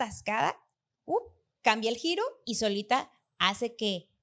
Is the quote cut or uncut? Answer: cut